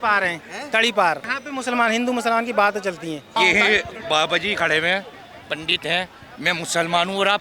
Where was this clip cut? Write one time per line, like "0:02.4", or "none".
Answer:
0:01.3
0:03.2